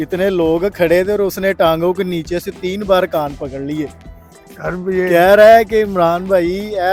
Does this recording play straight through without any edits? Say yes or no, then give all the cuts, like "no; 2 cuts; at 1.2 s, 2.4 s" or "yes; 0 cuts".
yes; 0 cuts